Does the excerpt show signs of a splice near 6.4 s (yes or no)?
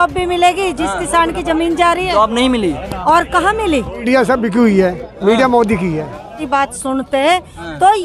yes